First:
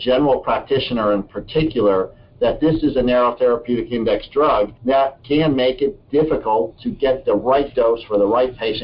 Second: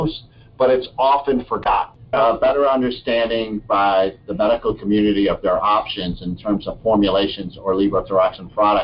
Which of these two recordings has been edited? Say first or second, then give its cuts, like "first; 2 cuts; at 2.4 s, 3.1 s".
second; 1 cut; at 1.9 s